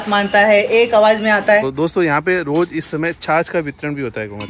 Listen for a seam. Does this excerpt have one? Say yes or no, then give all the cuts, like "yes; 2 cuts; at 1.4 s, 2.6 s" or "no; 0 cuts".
yes; 1 cut; at 1.6 s